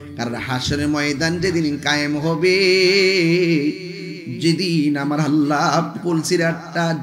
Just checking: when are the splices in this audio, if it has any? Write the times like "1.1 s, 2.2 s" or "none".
5.9 s